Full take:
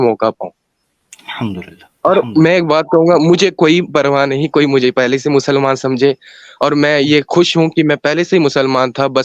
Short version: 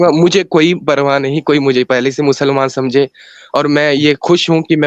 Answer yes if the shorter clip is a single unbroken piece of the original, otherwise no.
yes